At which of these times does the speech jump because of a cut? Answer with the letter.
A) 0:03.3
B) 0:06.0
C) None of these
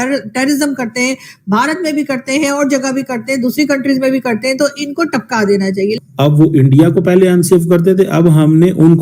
B